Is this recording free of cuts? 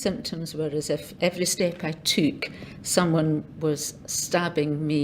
no; 1 cut; at 1.1 s

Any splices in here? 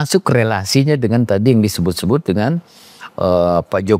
no; 0 cuts

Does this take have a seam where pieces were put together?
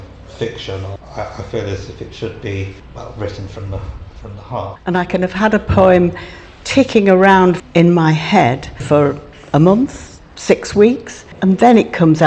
yes; 6 cuts; at 0.9 s, 2.8 s, 4.7 s, 7.6 s, 8.8 s, 11.3 s

